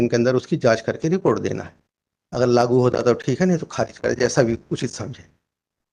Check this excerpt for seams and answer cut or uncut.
uncut